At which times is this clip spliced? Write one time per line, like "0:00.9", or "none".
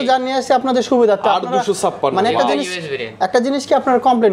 none